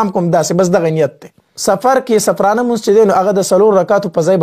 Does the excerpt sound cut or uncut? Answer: cut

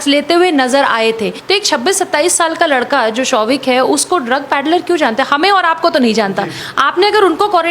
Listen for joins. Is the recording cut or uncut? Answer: cut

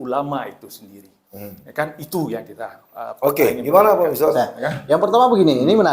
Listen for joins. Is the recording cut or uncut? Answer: uncut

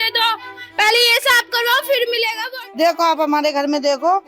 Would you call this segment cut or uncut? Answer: cut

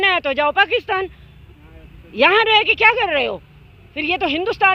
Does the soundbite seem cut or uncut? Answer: uncut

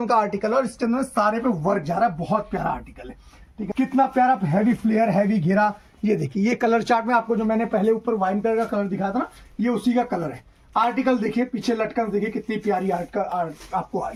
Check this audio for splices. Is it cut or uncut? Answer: uncut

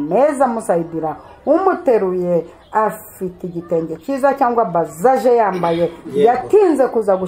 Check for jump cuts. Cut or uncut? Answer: uncut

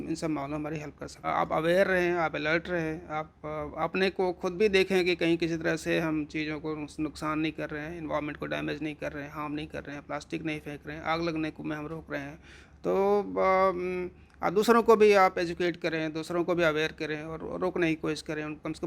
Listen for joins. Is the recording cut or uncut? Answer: cut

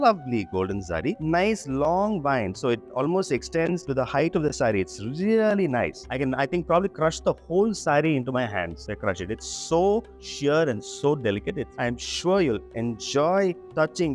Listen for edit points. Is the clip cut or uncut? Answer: cut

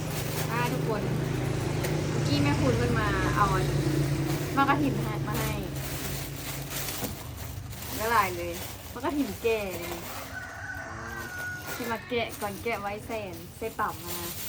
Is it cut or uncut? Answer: uncut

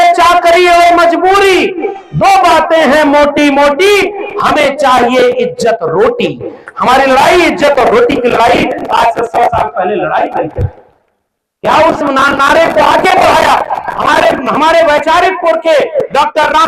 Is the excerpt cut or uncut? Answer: uncut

